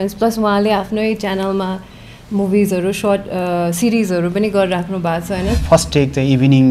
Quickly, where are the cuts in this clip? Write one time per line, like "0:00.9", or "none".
0:05.6